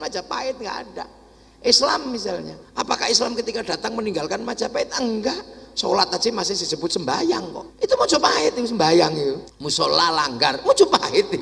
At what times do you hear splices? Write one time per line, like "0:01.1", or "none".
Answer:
0:02.6
0:07.6
0:09.5